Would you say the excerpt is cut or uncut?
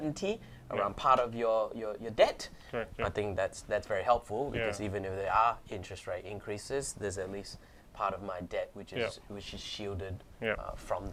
uncut